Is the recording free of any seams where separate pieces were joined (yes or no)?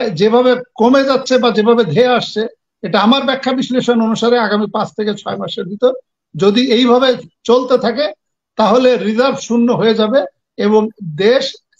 yes